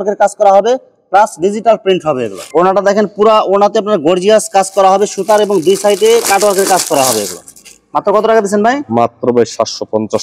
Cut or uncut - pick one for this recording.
uncut